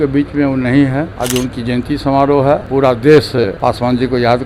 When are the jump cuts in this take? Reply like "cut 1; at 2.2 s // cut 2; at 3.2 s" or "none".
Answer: cut 1; at 1.1 s // cut 2; at 2.7 s // cut 3; at 3.5 s